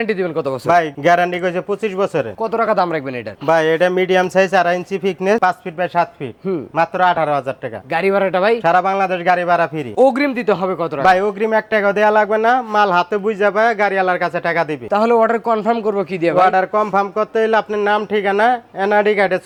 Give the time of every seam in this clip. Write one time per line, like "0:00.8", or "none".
none